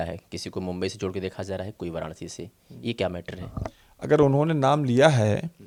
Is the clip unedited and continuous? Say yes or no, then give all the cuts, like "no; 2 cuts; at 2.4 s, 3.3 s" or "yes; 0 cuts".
yes; 0 cuts